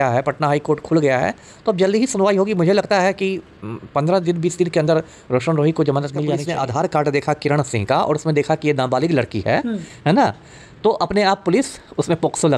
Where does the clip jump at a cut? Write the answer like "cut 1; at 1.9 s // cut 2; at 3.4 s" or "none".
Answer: cut 1; at 6.4 s